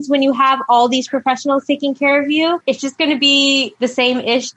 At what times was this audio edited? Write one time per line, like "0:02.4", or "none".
0:02.6
0:03.7